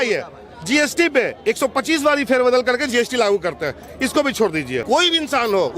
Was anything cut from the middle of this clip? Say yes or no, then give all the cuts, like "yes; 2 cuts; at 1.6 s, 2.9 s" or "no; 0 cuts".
yes; 1 cut; at 4.8 s